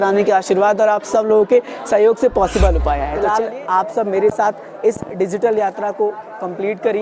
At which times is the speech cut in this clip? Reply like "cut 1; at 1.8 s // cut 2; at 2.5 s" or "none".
cut 1; at 3.1 s